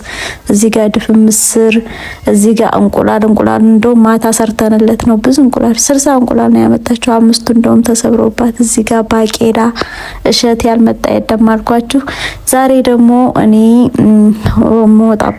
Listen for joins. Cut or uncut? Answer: uncut